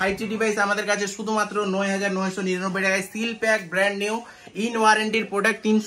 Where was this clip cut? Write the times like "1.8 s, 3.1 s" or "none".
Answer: none